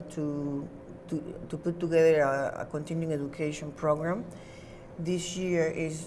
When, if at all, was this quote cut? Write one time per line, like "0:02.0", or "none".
none